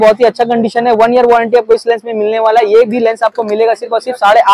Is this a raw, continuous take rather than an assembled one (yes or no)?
yes